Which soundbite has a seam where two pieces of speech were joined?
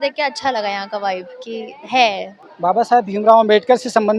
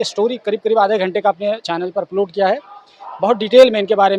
first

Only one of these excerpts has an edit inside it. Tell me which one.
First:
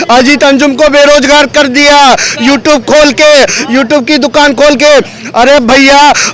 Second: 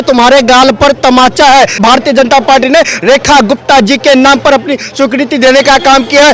second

